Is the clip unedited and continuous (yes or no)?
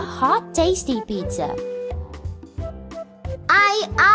yes